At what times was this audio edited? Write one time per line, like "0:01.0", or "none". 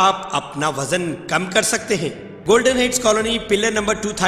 0:02.3

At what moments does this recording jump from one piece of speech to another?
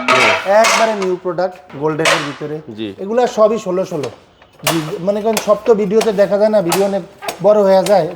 0:01.7

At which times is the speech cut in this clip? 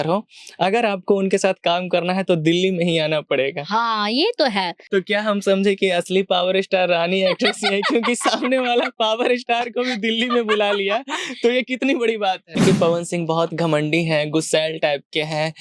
0:04.8
0:12.6

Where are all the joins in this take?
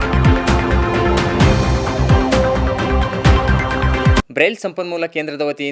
0:04.2

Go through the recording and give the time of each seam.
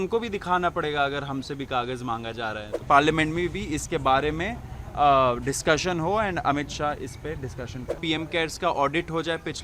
0:02.8
0:08.0

